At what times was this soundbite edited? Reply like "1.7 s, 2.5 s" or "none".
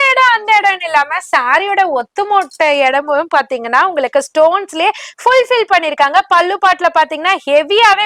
none